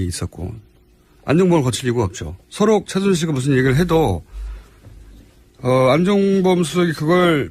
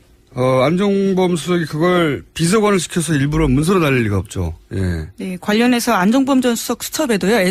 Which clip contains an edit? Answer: first; 1 cut; at 2.6 s

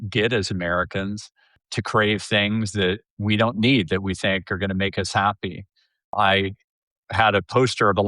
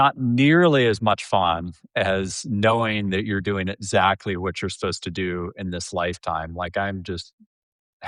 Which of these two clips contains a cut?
first; 2 cuts; at 1.6 s, 6.1 s

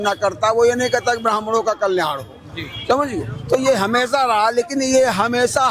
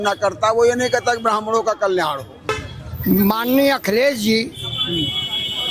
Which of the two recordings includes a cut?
second; 1 cut; at 2.5 s

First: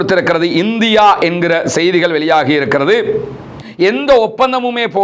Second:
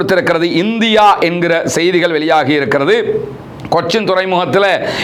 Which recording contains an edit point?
first; 1 cut; at 3.6 s

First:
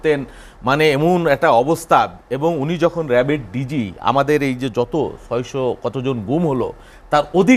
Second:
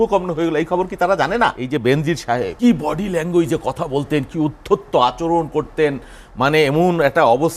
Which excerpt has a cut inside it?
second; 2 cuts; at 1.6 s, 2.5 s

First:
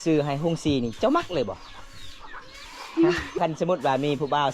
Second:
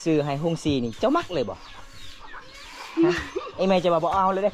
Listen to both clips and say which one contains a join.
first; 1 cut; at 3.4 s

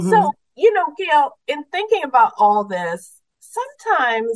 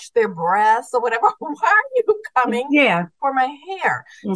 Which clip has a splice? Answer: second; 1 cut; at 3.1 s

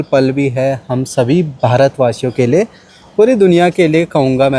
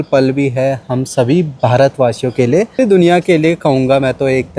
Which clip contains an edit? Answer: second; 1 cut; at 2.8 s

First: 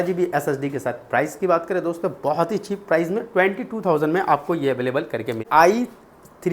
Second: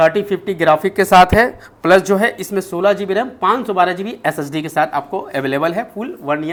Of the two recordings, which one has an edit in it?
first; 1 cut; at 5.4 s

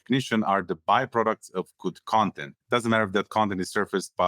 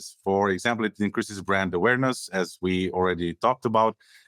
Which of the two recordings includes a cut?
first; 1 cut; at 2.5 s

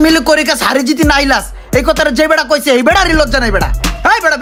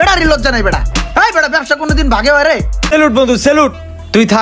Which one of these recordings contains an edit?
second; 1 cut; at 2.8 s

